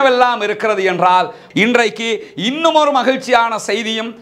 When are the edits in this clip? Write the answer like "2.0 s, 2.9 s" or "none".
1.4 s